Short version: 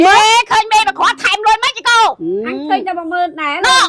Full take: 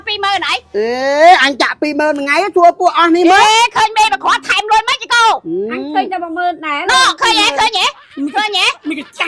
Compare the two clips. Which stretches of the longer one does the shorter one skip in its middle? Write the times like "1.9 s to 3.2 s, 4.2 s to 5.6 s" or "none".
none

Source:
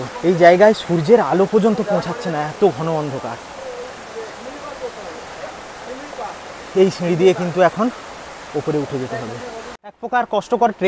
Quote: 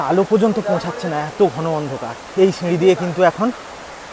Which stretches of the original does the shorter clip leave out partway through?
3.4 s to 6.6 s

